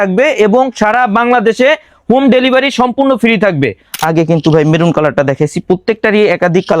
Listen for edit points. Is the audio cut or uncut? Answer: cut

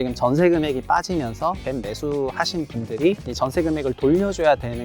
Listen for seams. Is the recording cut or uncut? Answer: cut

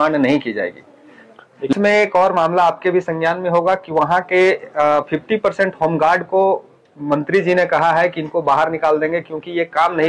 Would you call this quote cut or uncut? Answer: cut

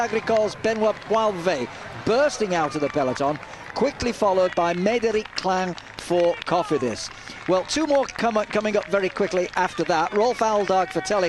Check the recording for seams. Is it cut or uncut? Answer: cut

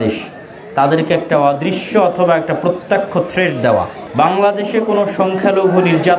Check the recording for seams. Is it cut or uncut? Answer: cut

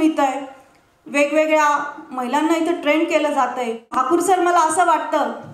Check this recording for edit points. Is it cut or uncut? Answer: cut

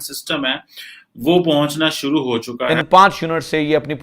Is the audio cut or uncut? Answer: cut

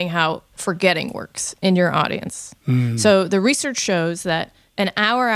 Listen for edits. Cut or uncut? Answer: uncut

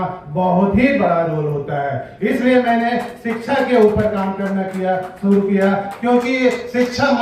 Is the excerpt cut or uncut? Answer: uncut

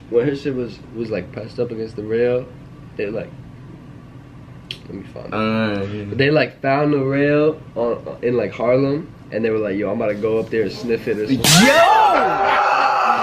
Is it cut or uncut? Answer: uncut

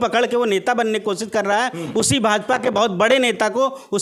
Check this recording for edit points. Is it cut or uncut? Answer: uncut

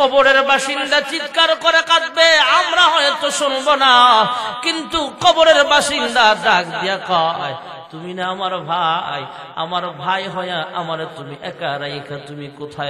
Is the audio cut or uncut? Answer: uncut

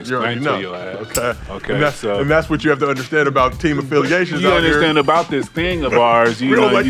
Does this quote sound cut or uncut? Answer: uncut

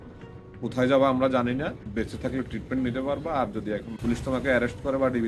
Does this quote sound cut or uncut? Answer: cut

